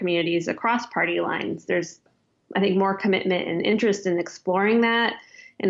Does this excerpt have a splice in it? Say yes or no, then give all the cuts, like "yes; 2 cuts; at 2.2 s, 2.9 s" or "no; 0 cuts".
yes; 1 cut; at 2.0 s